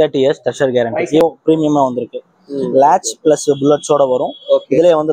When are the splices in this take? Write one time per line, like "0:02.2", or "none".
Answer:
0:01.2